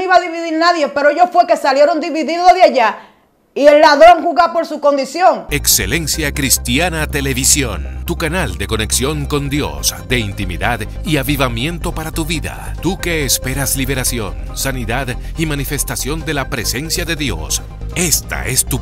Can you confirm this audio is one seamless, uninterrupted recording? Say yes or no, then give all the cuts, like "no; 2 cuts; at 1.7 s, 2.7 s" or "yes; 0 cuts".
no; 1 cut; at 5.5 s